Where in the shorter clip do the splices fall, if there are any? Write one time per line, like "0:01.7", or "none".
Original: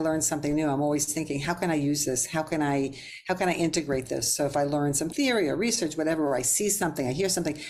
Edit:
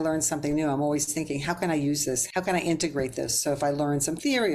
0:02.2